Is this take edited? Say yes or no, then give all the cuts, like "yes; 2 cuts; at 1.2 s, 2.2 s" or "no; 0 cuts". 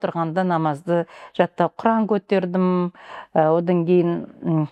no; 0 cuts